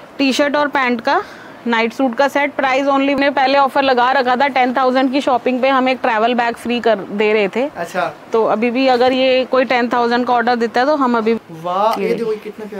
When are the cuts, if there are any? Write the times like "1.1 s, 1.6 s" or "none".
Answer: 3.2 s, 11.4 s